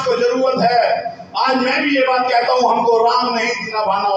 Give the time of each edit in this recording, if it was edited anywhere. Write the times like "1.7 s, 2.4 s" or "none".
none